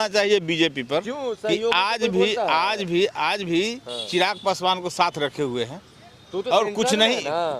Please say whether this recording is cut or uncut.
uncut